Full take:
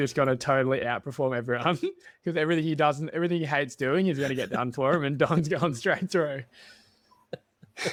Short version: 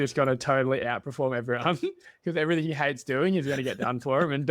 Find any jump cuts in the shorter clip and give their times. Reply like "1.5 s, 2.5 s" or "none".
2.7 s